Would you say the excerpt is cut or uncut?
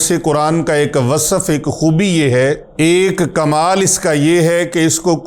cut